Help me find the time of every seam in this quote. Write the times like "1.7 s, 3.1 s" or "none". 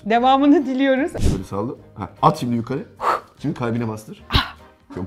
1.1 s